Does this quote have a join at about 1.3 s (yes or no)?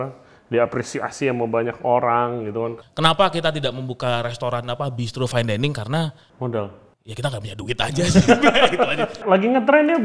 no